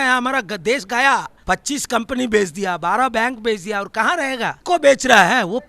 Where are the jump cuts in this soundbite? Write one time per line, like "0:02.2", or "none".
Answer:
0:01.3
0:04.6